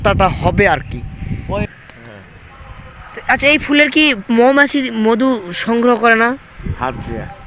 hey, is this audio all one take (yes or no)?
no